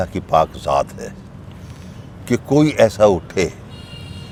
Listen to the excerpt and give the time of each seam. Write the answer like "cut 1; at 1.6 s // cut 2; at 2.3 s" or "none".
none